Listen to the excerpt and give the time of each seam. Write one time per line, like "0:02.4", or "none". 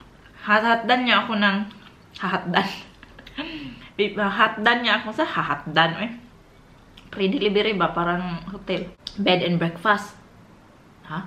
0:09.0